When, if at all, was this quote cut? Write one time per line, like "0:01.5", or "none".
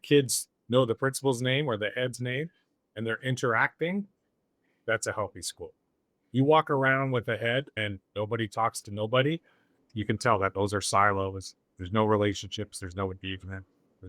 0:07.8
0:09.8

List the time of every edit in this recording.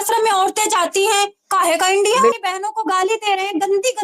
0:02.4

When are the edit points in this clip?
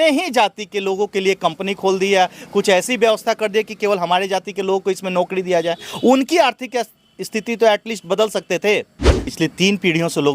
0:09.2

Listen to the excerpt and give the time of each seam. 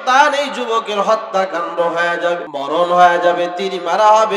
0:02.5

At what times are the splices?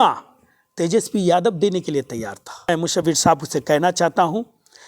0:02.7

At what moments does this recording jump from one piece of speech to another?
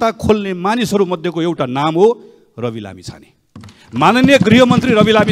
none

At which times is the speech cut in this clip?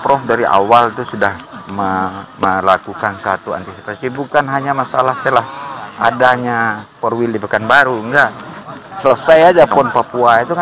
none

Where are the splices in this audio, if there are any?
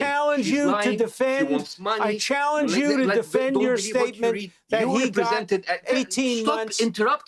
none

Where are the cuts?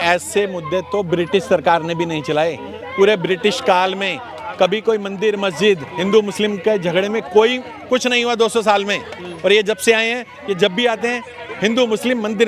none

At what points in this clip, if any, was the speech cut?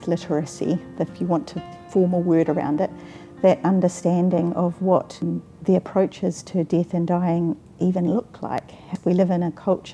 0:05.2
0:08.8

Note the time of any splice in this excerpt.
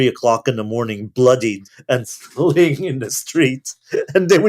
0:01.7

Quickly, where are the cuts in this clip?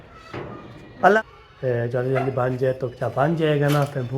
0:01.1

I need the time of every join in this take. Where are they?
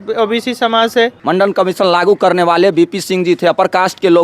0:01.1

